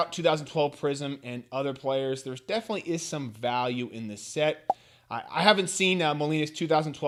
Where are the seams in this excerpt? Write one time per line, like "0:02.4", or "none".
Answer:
none